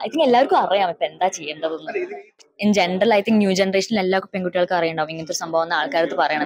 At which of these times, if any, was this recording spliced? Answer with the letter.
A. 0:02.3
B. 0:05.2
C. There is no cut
A